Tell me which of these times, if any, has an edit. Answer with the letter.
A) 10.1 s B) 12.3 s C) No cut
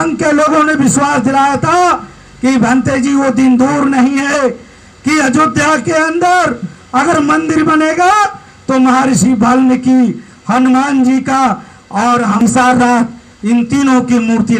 B